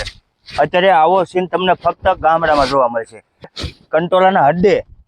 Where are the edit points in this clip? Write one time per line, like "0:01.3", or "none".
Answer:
0:03.6